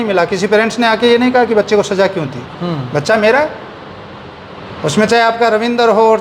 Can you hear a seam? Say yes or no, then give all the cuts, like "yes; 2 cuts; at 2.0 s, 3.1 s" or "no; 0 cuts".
no; 0 cuts